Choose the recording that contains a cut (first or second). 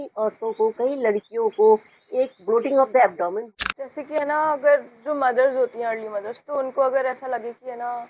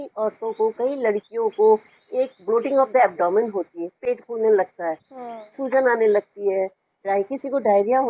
first